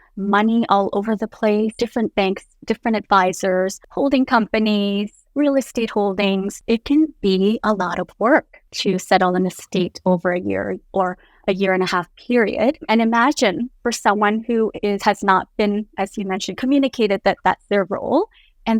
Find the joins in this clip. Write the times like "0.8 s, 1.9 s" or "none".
1.7 s, 3.8 s, 6.5 s, 8.6 s, 12.8 s